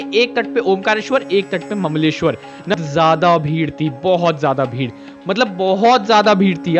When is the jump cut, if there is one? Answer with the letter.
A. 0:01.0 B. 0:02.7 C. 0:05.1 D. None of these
B